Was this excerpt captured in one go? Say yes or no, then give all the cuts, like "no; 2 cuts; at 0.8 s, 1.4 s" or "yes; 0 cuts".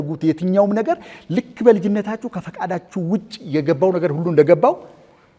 yes; 0 cuts